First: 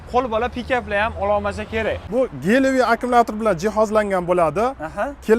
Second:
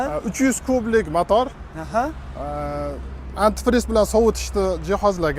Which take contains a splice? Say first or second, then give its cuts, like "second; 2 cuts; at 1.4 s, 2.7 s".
first; 1 cut; at 2.0 s